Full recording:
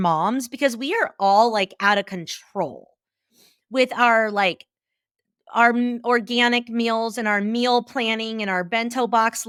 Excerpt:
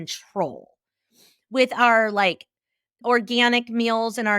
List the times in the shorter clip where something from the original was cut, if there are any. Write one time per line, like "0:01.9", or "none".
0:03.0